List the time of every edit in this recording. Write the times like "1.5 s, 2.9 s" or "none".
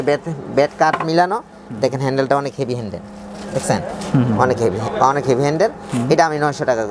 none